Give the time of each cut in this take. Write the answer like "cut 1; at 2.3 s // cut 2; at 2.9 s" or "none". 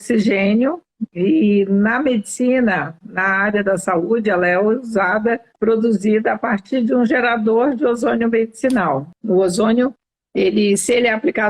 cut 1; at 5.5 s // cut 2; at 9.1 s